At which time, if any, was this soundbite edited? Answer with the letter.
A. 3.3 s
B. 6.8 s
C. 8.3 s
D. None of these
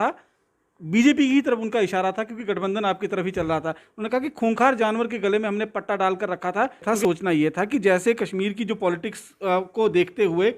B